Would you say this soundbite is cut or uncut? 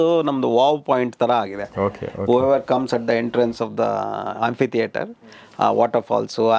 uncut